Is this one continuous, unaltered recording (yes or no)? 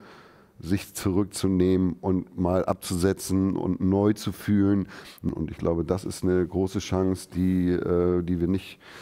no